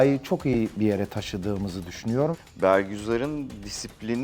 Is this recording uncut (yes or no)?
no